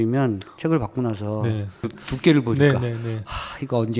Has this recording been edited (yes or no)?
yes